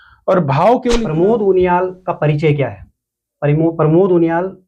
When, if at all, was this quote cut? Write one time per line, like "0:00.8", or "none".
0:01.1